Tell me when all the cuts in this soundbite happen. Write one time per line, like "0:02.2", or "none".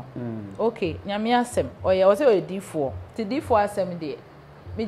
0:03.1